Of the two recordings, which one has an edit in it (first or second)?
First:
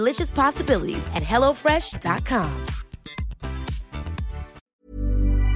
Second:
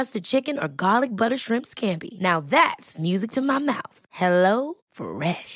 first